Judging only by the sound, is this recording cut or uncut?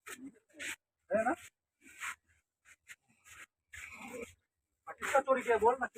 uncut